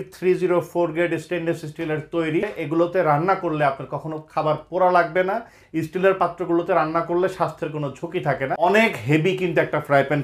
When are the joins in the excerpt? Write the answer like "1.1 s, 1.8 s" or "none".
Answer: 2.5 s, 5.6 s, 8.5 s